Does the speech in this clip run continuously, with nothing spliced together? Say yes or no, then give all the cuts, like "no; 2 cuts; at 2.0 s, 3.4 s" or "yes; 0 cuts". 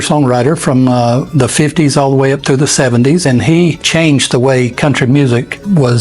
yes; 0 cuts